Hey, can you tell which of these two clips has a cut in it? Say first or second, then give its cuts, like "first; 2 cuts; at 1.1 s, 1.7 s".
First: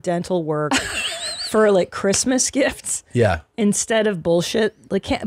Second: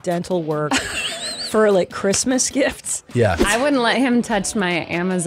second; 1 cut; at 3.4 s